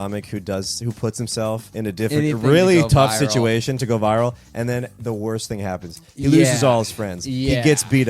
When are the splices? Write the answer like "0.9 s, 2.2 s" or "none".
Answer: 1.7 s